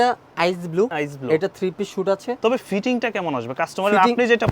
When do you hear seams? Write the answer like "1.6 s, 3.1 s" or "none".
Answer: 0.9 s, 2.4 s